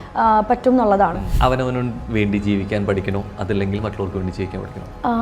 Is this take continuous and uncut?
no; 1 cut; at 1.3 s

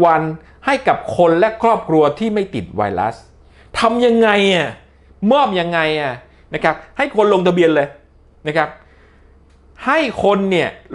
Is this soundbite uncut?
yes; 0 cuts

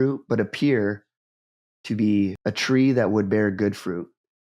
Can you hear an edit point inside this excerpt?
yes; 1 cut; at 2.4 s

